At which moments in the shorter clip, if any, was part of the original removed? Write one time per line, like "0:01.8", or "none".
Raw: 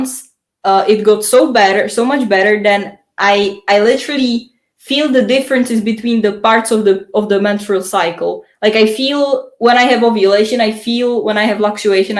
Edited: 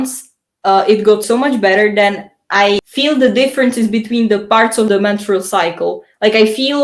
0:01.2
0:02.9
0:04.9